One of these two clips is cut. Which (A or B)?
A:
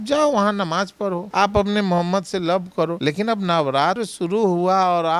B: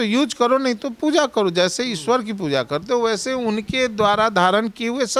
A